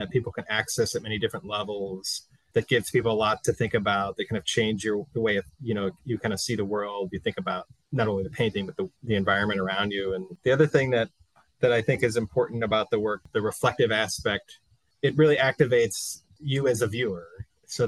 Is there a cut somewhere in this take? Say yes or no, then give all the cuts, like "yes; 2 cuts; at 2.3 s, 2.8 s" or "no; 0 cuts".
yes; 4 cuts; at 7.7 s, 9.0 s, 10.3 s, 13.2 s